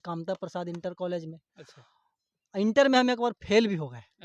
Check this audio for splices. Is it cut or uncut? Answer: uncut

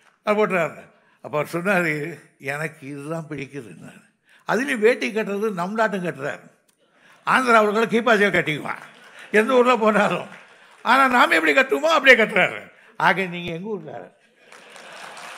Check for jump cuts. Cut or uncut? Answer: cut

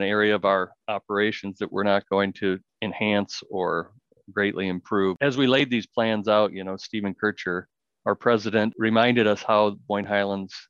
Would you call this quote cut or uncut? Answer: cut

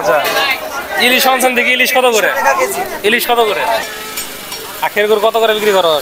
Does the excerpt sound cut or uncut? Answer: cut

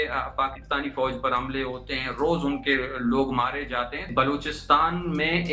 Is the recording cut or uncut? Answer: cut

